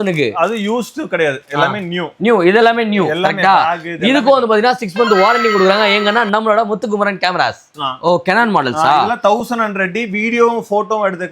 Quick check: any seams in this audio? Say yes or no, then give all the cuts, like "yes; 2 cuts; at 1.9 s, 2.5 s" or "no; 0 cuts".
yes; 1 cut; at 7.7 s